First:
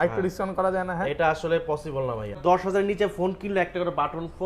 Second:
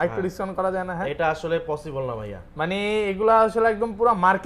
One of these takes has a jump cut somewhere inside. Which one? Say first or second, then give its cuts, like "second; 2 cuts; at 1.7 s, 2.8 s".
first; 1 cut; at 2.4 s